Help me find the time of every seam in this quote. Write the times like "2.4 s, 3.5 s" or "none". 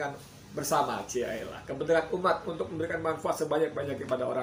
none

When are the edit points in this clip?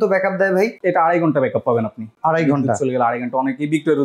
none

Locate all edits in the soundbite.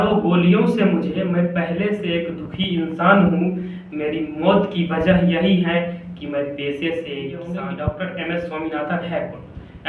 7.5 s

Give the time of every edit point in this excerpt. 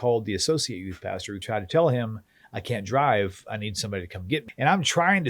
1.4 s, 4.5 s

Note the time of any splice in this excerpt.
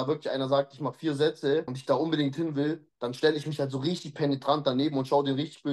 1.7 s

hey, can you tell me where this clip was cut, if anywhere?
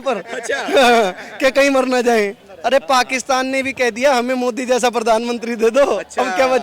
2.5 s

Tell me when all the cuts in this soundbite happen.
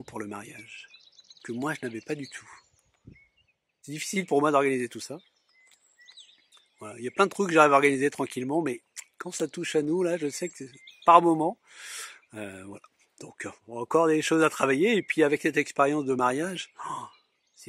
3.9 s

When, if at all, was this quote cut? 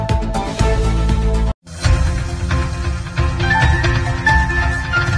none

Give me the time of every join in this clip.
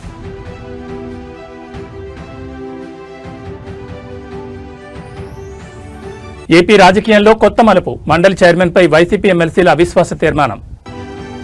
none

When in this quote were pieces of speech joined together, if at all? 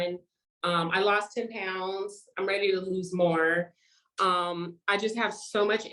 none

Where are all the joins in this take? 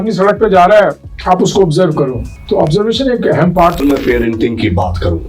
1.1 s, 2.3 s, 3.8 s

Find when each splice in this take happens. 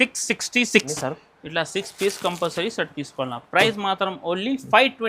0.9 s

